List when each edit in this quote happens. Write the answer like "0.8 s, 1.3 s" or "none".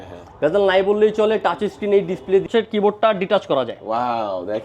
2.5 s